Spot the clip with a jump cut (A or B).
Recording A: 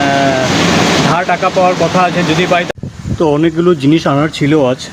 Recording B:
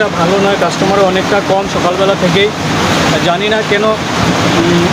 A